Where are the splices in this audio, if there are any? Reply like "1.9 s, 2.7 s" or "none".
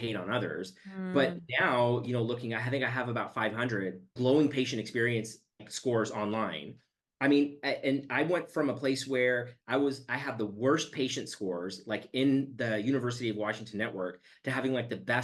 4.1 s, 5.7 s

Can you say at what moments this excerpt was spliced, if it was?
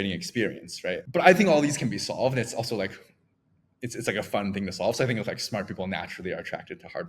1.0 s

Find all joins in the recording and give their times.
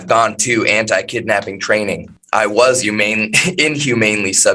2.1 s

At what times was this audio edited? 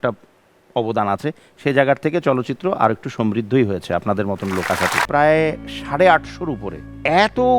5.0 s

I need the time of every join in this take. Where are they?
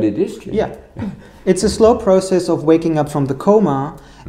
none

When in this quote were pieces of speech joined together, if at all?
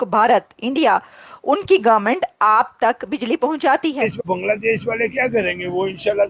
4.3 s

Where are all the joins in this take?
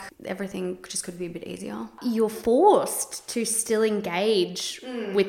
1.9 s

